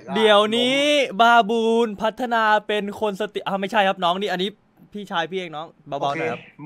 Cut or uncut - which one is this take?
uncut